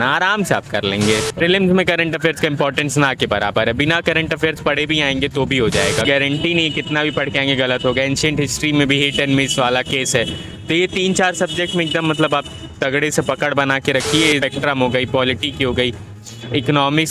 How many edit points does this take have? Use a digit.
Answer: 3